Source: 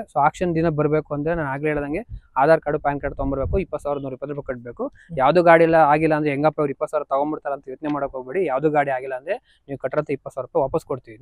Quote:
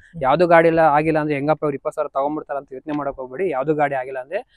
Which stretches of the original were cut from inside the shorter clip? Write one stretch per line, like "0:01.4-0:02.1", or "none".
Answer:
none